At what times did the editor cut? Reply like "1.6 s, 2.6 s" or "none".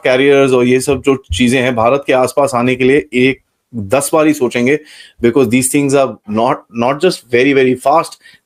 none